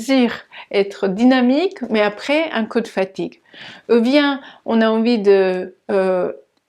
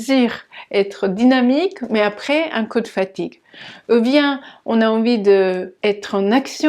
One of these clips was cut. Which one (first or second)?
second